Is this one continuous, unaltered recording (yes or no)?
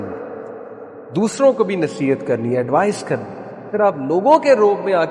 no